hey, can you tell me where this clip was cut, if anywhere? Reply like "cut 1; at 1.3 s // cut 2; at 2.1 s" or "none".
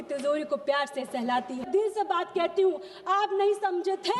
cut 1; at 1.7 s